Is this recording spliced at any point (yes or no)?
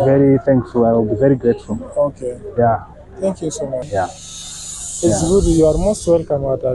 yes